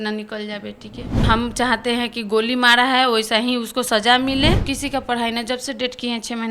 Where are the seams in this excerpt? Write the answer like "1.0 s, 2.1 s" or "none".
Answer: 1.2 s, 4.7 s